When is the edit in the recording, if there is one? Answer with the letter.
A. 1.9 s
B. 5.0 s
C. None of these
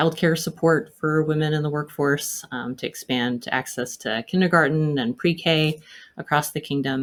C